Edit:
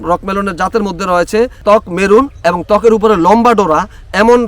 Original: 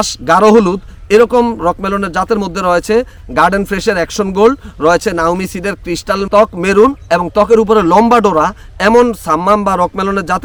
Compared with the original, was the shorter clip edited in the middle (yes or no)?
yes